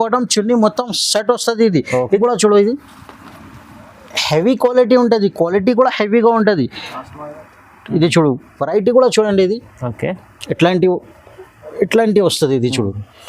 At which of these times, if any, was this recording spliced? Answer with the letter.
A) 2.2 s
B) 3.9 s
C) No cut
A